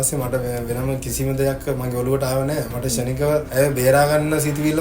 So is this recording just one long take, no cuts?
no; 1 cut; at 3.5 s

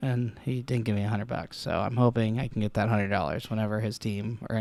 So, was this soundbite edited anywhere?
no; 0 cuts

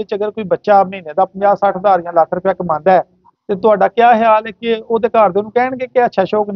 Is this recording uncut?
yes; 0 cuts

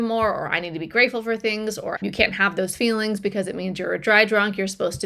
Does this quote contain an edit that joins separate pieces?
yes; 1 cut; at 2.0 s

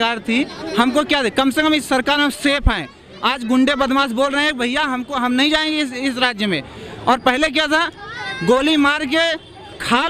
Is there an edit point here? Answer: no; 0 cuts

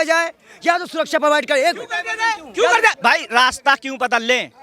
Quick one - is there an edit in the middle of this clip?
yes; 1 cut; at 3.0 s

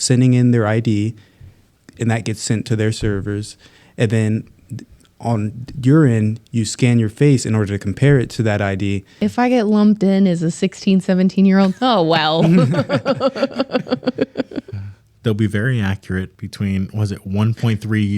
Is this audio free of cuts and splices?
no; 1 cut; at 9.1 s

